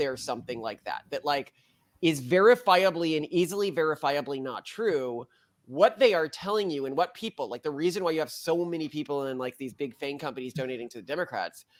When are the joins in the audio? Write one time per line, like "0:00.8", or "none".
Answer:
none